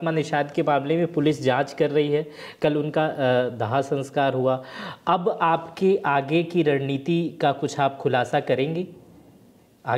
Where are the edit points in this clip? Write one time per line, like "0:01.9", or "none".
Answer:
none